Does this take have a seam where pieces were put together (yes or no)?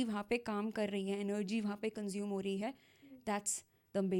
no